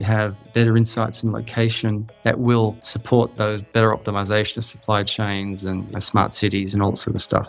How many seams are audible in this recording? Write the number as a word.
two